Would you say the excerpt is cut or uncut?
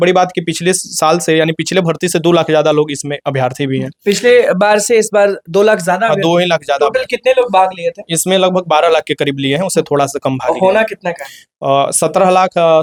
uncut